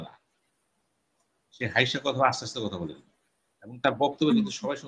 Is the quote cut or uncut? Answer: uncut